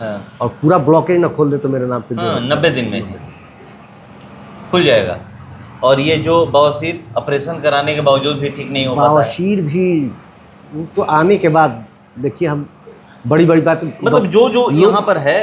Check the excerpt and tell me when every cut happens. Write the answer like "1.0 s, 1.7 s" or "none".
none